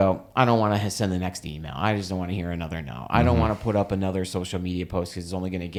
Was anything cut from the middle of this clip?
no; 0 cuts

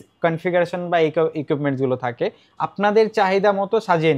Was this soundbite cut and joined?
no; 0 cuts

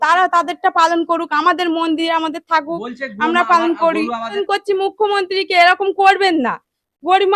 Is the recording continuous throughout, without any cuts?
no; 1 cut; at 4.3 s

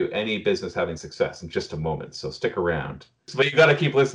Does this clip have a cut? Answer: yes; 1 cut; at 3.2 s

